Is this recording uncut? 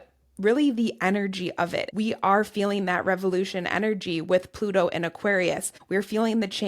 no; 2 cuts; at 1.8 s, 5.7 s

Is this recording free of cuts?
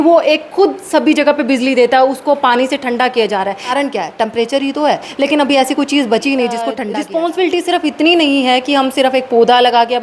no; 3 cuts; at 3.7 s, 5.1 s, 6.8 s

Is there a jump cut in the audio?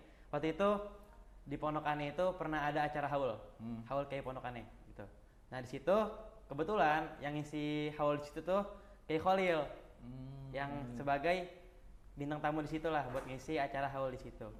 no; 0 cuts

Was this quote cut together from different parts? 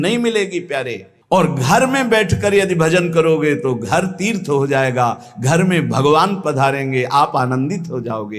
no; 0 cuts

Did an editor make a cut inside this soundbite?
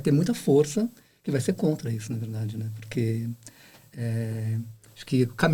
no; 0 cuts

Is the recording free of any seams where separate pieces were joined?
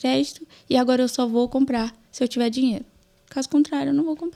yes; 0 cuts

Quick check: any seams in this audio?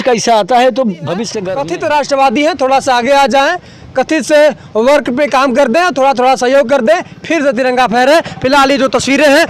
yes; 1 cut; at 1.4 s

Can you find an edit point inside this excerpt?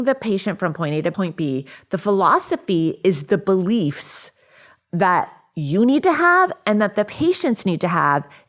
yes; 1 cut; at 1.1 s

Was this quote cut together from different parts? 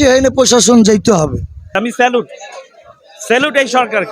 yes; 1 cut; at 1.7 s

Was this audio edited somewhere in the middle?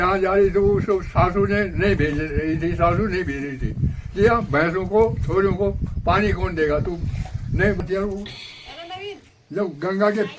yes; 1 cut; at 7.8 s

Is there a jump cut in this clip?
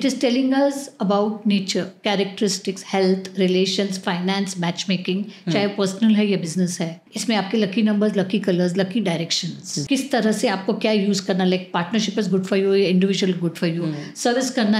yes; 2 cuts; at 7.0 s, 9.8 s

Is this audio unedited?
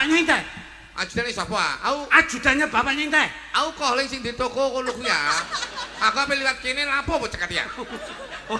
yes; 0 cuts

